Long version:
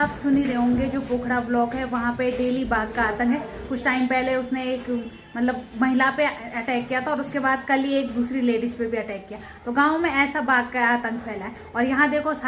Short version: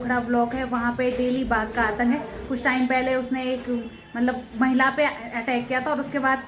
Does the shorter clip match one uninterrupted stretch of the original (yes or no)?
yes